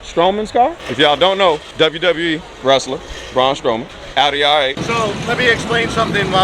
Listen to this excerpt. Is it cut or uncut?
cut